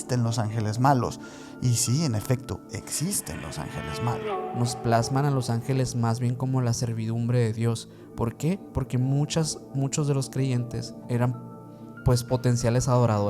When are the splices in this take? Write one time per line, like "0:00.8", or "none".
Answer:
0:04.2
0:11.0

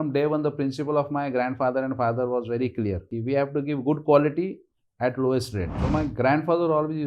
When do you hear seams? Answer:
0:03.1
0:05.7

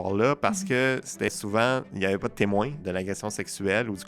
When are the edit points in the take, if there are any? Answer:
0:01.3
0:02.8

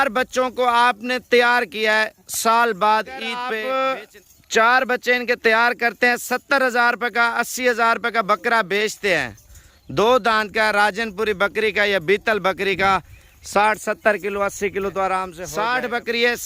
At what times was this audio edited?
0:03.3
0:15.4

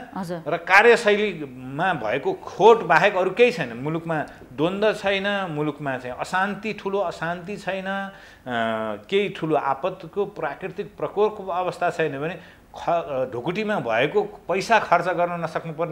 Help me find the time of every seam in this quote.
none

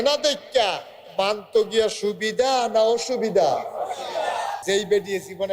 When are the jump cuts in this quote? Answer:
0:04.6

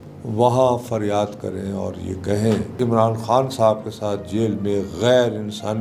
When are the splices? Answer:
0:02.7

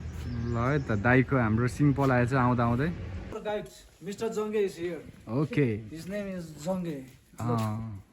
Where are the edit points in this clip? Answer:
0:03.3

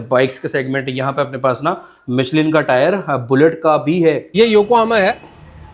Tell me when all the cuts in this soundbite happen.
0:04.2

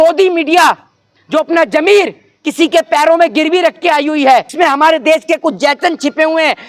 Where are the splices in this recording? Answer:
0:04.5

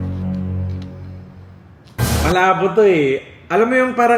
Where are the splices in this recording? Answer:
none

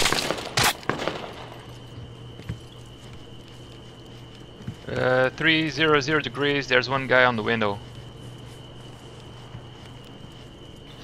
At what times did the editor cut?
0:02.8

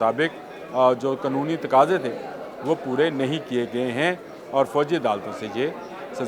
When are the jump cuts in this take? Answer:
none

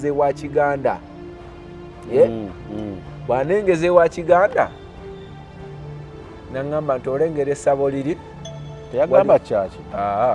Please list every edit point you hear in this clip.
none

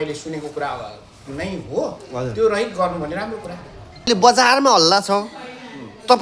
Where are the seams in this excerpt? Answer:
0:04.1

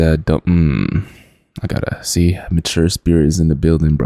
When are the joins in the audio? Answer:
none

